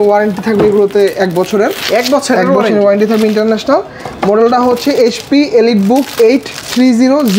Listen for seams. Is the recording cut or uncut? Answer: uncut